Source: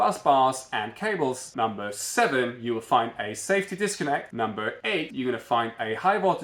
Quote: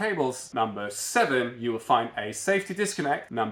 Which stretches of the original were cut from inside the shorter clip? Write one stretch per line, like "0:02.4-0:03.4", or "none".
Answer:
none